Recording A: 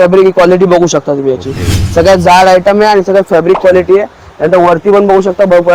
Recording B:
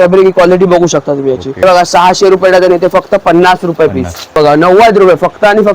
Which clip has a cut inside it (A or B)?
B